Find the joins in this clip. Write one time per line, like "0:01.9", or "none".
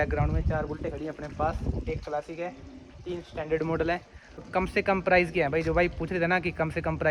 0:04.4